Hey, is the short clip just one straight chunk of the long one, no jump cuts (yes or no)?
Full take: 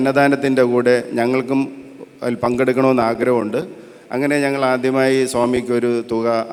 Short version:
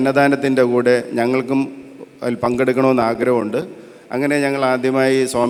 yes